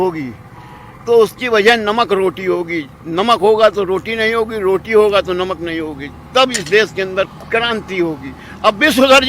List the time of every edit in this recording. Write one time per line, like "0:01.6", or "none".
none